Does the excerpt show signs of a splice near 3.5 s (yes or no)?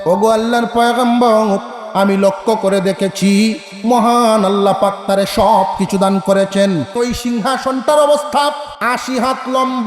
no